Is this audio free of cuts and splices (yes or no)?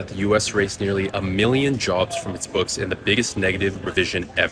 yes